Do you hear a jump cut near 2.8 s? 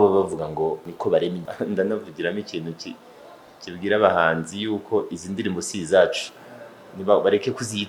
no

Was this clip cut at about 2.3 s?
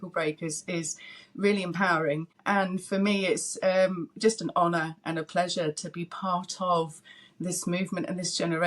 yes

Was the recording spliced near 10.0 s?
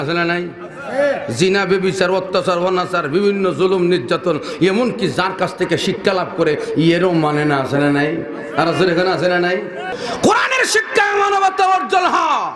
yes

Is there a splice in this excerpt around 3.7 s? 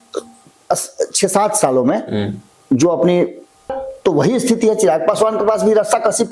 yes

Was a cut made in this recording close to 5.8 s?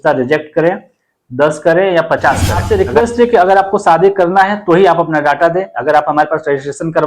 no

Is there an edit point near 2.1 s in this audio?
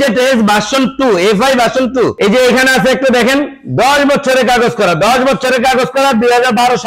no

